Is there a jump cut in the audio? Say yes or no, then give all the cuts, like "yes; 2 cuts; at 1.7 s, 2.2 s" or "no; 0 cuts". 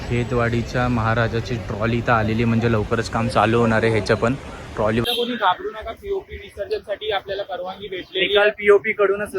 yes; 1 cut; at 5.0 s